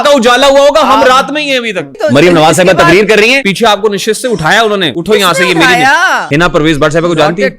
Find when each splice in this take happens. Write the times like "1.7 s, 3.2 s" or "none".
1.9 s, 3.5 s, 4.9 s, 6.2 s